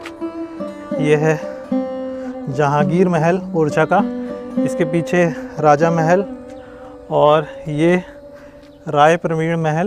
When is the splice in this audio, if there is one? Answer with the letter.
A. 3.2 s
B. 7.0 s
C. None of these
C